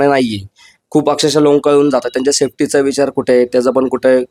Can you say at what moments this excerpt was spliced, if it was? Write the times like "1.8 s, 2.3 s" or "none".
none